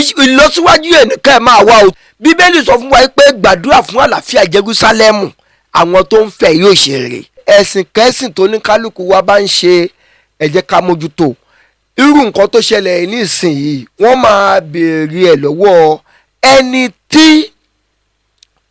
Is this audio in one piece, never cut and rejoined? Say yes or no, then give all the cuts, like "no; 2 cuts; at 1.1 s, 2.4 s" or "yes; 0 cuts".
no; 2 cuts; at 1.9 s, 7.4 s